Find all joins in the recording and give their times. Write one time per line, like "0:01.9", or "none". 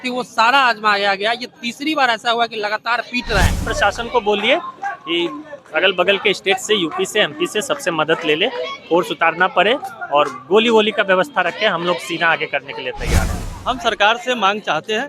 0:03.7
0:13.3